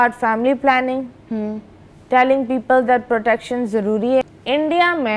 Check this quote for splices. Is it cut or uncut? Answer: cut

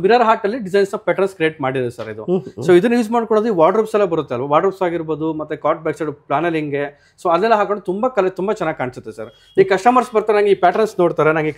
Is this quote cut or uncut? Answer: uncut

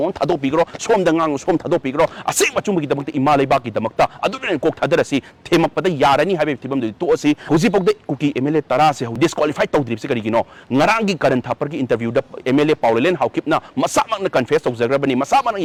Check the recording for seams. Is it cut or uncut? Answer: uncut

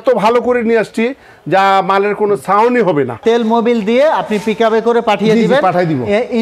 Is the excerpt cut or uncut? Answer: cut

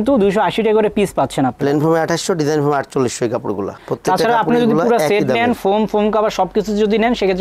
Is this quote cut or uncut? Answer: uncut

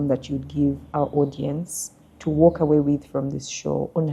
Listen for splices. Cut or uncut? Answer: uncut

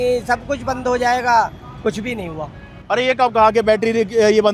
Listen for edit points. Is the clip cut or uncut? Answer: uncut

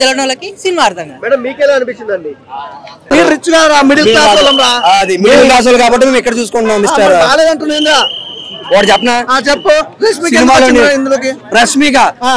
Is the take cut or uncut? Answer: uncut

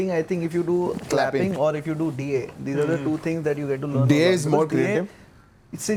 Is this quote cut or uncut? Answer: uncut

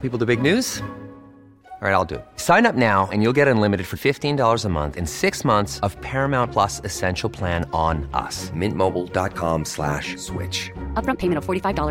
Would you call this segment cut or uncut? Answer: uncut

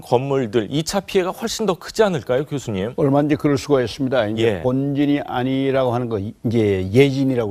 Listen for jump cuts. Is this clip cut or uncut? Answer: uncut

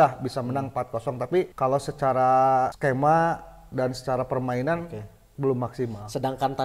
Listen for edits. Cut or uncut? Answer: cut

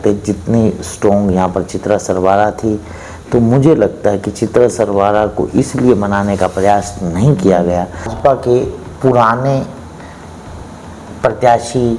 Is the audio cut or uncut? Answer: cut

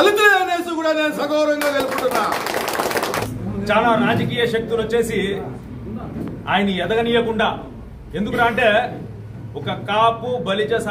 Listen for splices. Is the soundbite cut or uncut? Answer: cut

